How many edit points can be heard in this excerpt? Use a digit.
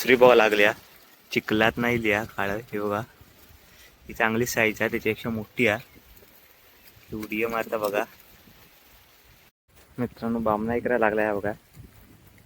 1